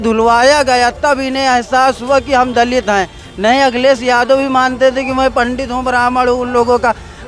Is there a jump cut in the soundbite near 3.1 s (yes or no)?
no